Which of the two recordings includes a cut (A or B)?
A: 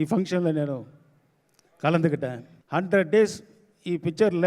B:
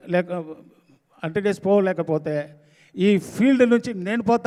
A